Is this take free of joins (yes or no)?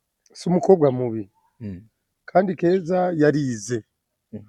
yes